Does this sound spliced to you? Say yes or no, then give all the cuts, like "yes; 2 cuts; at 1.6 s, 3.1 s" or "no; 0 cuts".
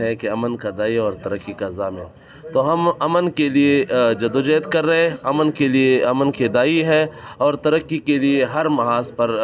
no; 0 cuts